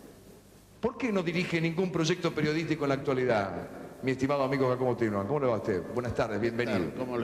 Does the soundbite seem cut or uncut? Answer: uncut